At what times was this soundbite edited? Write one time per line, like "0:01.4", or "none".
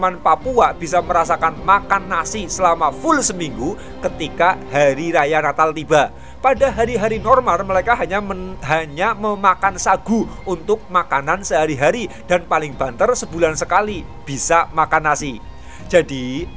none